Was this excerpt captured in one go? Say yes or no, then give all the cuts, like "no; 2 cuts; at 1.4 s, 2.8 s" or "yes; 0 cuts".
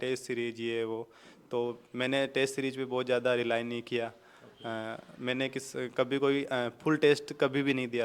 yes; 0 cuts